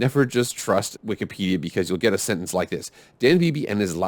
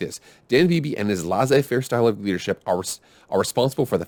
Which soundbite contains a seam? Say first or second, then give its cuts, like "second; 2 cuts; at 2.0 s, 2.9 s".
first; 1 cut; at 0.9 s